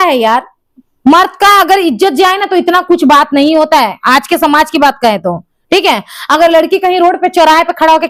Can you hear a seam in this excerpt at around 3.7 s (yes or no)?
no